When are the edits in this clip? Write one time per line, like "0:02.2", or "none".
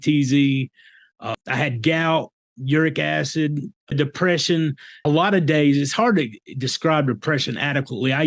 0:01.3
0:03.9
0:05.1

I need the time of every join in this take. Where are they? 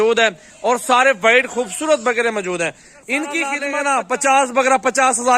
0:03.6

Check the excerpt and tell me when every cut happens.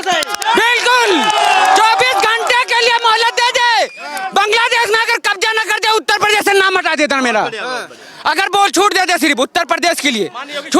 none

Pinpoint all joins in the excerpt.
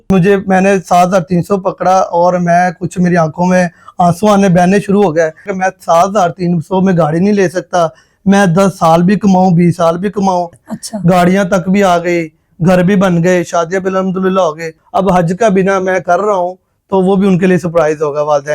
0:05.5
0:10.6
0:14.8

